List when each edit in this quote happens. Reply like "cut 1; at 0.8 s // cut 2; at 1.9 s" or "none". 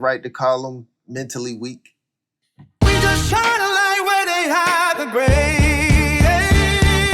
cut 1; at 2.8 s